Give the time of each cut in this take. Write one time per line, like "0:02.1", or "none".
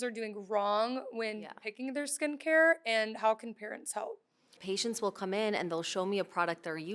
0:04.6